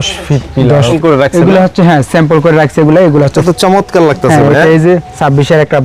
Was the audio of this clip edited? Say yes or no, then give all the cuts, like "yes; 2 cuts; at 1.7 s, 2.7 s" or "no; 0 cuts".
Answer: yes; 2 cuts; at 0.9 s, 3.4 s